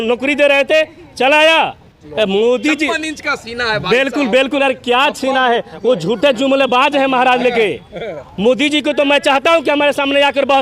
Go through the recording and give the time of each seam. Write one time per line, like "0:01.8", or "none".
0:02.0